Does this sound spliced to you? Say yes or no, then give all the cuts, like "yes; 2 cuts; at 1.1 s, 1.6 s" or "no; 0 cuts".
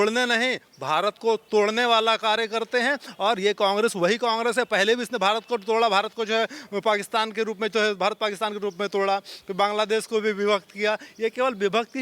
no; 0 cuts